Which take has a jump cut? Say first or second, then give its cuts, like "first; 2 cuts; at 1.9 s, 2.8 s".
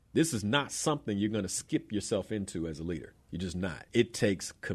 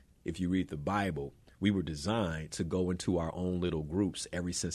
first; 1 cut; at 3.8 s